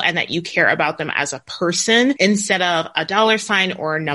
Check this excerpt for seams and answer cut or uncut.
cut